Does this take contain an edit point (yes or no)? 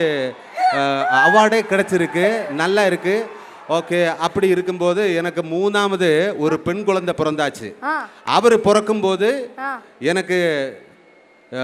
no